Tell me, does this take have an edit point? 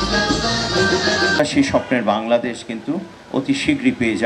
yes; 1 cut; at 1.4 s

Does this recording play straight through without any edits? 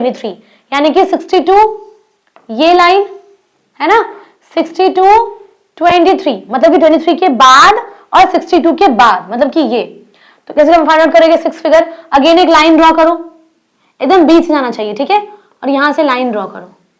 yes; 0 cuts

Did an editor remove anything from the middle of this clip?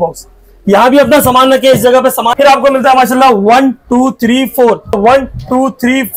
yes; 2 cuts; at 2.3 s, 5.0 s

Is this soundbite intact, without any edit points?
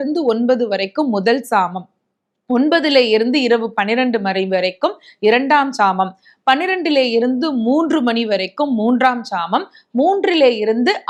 yes; 0 cuts

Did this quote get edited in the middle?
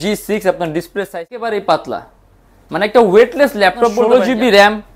yes; 2 cuts; at 1.1 s, 4.0 s

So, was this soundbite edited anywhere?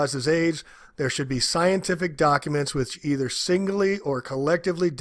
no; 0 cuts

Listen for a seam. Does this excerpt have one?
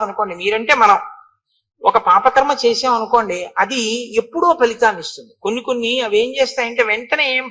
no; 0 cuts

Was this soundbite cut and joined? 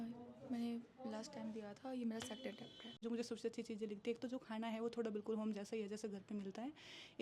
yes; 1 cut; at 3.0 s

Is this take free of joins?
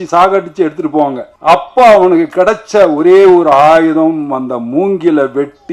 no; 1 cut; at 1.3 s

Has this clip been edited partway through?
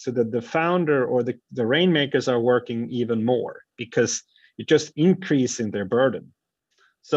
no; 0 cuts

